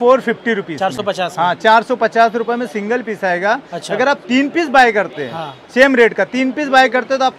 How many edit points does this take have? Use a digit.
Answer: 0